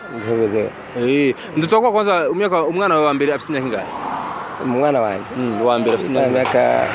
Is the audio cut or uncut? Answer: uncut